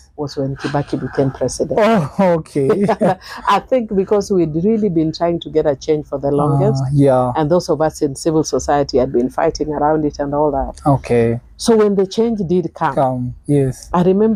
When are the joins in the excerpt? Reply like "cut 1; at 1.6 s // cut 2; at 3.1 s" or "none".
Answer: none

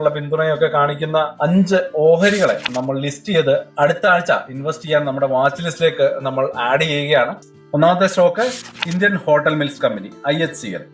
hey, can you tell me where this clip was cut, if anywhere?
cut 1; at 7.5 s

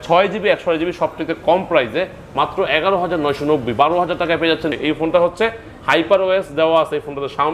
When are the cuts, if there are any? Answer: cut 1; at 4.8 s

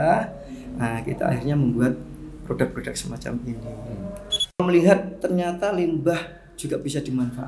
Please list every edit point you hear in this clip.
cut 1; at 4.6 s

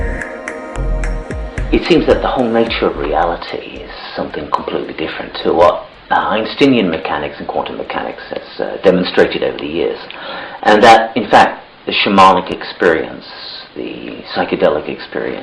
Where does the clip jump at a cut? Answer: cut 1; at 6.2 s

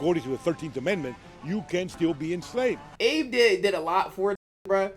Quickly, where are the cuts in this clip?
cut 1; at 2.9 s

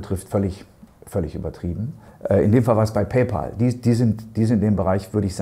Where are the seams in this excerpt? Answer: cut 1; at 2.1 s

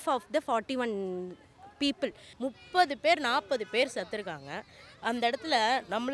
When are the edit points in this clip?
cut 1; at 2.2 s

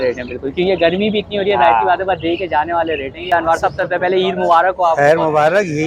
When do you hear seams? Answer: cut 1; at 3.3 s

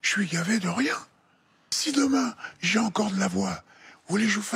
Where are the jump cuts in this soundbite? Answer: cut 1; at 1.8 s

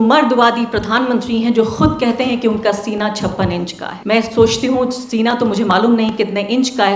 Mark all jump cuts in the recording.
cut 1; at 3.9 s

